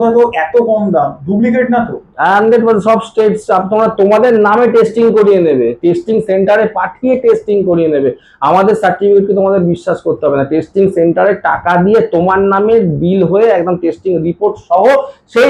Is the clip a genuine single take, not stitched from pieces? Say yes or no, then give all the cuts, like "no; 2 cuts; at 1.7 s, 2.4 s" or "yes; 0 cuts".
yes; 0 cuts